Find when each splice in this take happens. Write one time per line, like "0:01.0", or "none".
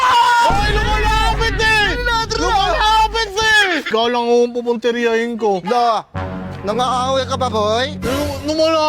0:03.9